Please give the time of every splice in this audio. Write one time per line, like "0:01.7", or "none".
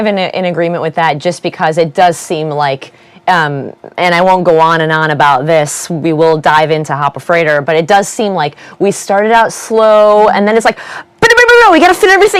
0:01.5